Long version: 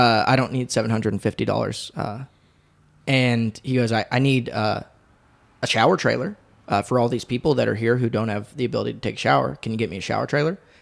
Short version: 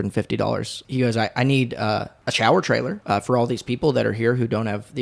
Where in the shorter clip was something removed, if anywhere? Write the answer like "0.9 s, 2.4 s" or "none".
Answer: 0.8 s, 2.2 s, 3.0 s

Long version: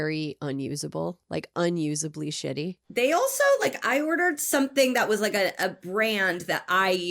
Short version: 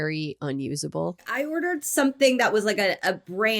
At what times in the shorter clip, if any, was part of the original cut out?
1.3 s

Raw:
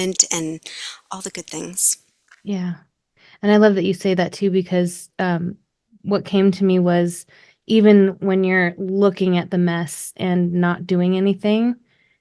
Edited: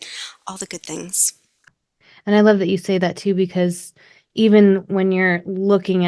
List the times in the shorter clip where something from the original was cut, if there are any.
1.7 s, 3.9 s

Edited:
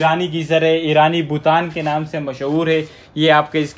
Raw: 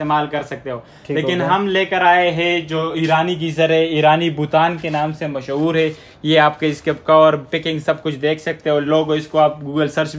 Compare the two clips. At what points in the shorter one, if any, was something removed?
none

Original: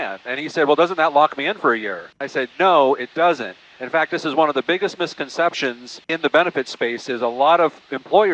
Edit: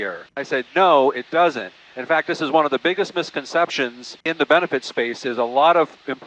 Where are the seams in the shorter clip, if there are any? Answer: none

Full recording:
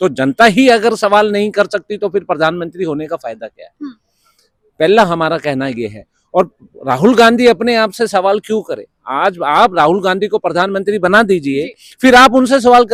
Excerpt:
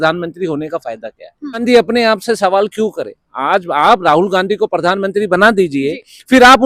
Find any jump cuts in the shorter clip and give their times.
1.6 s

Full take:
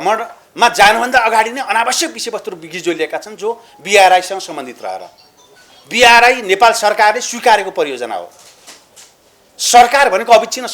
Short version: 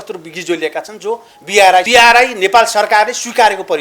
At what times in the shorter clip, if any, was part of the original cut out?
1.9 s

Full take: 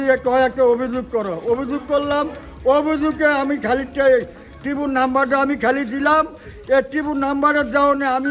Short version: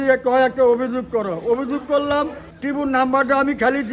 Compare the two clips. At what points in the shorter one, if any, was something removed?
2.4 s

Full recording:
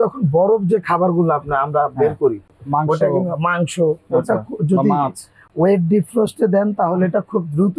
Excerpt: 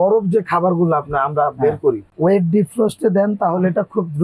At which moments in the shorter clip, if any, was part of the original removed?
2.1 s

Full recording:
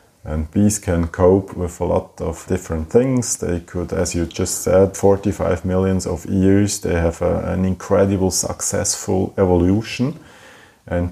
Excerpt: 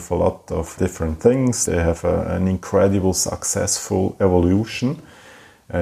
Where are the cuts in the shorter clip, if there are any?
1.6 s

